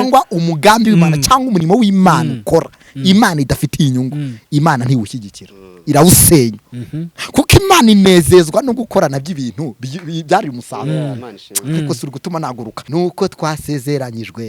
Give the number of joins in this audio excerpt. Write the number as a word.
one